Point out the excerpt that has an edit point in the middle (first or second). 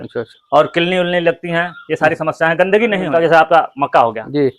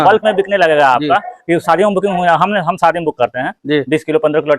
first